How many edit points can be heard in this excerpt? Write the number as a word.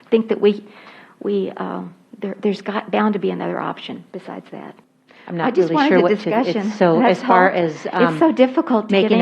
one